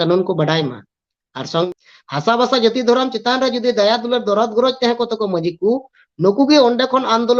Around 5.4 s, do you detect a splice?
no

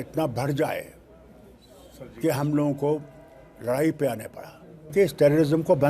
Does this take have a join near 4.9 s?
yes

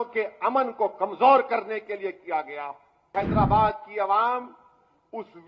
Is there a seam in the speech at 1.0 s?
no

